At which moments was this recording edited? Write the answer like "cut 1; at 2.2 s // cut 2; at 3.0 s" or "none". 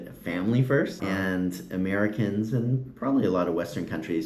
cut 1; at 1.0 s